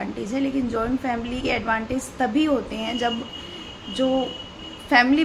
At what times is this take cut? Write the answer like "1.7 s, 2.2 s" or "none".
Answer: none

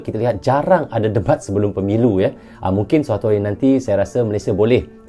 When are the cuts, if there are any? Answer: none

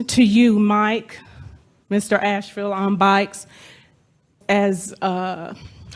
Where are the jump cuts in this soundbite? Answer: 4.3 s

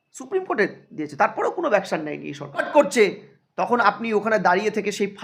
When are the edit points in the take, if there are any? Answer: 2.7 s

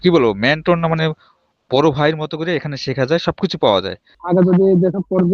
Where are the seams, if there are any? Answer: 4.1 s

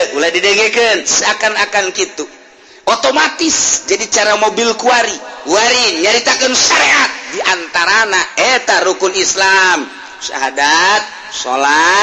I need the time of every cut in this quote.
5.3 s

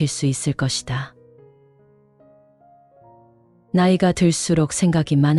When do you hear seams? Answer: 1.2 s, 3.7 s

